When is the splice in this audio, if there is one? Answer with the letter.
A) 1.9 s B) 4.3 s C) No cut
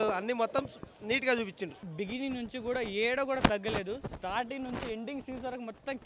A